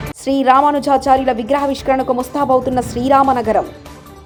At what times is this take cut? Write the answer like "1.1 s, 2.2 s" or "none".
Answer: none

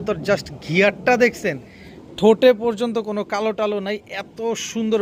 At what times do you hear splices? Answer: none

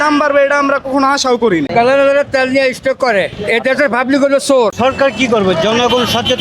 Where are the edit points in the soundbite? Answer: 1.7 s, 4.8 s

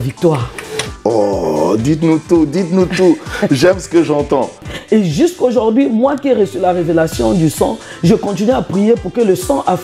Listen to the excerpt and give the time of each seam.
4.6 s

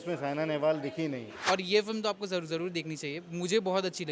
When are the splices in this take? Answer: 1.4 s

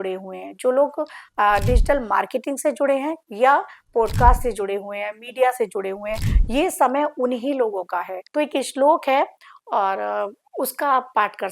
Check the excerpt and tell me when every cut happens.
8.2 s

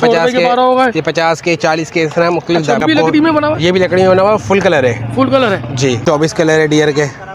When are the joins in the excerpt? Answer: 2.8 s, 6.0 s

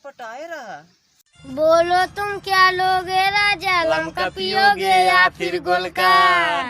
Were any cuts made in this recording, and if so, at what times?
1.0 s

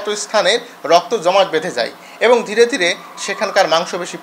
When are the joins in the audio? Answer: none

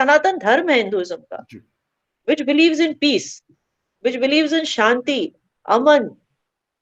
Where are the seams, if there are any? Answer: none

